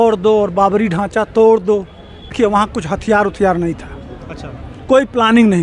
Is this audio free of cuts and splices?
no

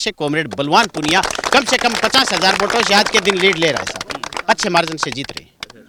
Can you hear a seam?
no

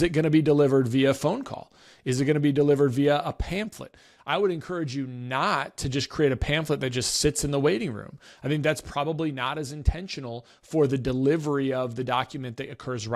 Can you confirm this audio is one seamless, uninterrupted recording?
yes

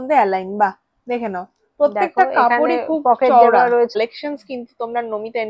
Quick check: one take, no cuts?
no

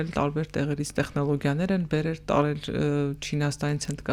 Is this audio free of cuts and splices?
yes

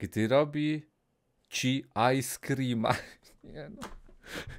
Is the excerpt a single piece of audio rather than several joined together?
yes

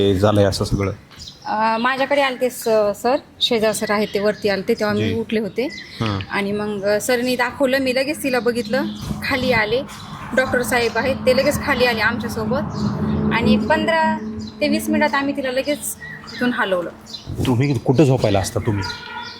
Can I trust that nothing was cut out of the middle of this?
yes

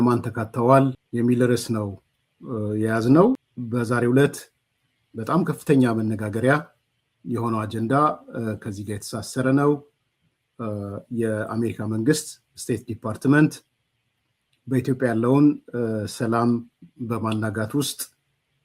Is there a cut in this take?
yes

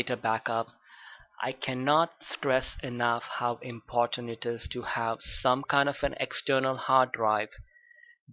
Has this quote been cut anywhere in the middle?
yes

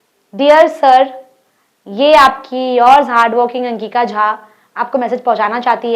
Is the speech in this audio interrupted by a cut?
no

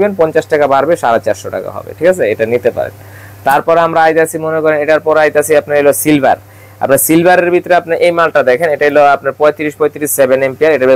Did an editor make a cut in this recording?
no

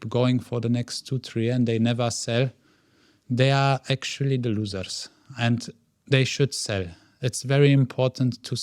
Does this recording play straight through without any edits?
yes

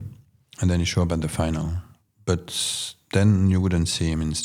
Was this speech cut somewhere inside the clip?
no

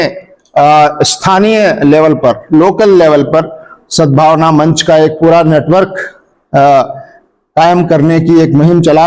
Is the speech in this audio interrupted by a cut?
no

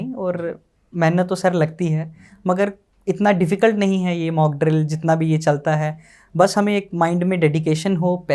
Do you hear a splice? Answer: no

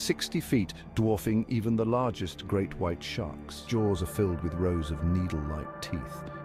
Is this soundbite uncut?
no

